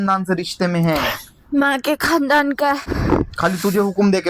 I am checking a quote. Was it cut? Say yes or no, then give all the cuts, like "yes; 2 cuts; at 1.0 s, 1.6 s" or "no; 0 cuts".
yes; 1 cut; at 2.9 s